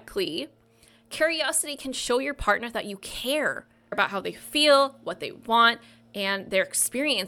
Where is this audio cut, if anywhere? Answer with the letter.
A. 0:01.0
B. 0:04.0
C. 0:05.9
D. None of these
B